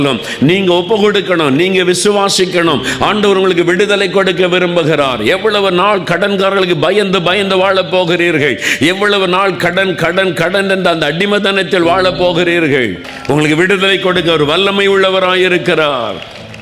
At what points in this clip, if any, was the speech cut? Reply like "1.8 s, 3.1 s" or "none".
13.0 s